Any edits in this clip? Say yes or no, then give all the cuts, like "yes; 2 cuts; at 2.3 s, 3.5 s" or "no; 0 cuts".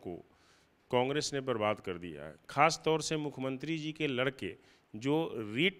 no; 0 cuts